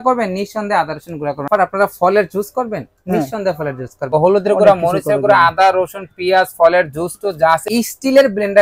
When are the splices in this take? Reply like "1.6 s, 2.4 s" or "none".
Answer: 1.5 s, 4.1 s, 7.6 s